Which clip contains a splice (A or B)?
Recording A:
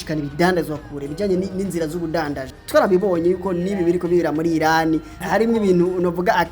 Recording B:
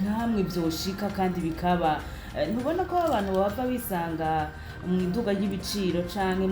A